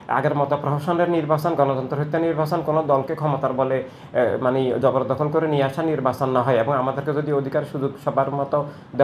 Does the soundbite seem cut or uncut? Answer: uncut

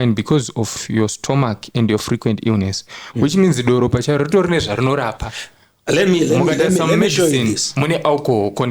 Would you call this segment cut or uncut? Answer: uncut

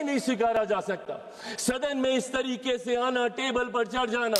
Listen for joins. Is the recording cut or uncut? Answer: uncut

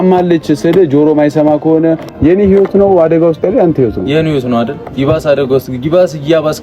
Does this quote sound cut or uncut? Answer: cut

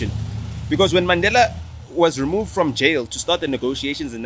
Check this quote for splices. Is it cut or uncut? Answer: uncut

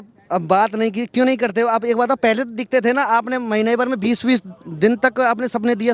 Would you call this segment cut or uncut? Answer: uncut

